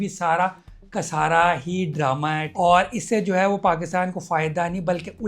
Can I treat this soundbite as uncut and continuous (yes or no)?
no